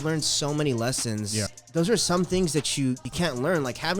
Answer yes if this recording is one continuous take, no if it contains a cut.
no